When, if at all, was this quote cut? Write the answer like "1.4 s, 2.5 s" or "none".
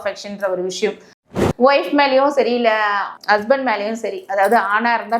1.3 s